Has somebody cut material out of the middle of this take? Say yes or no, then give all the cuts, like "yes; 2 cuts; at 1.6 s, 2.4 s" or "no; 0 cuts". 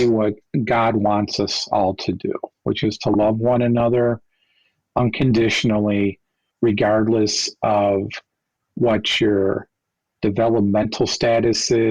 no; 0 cuts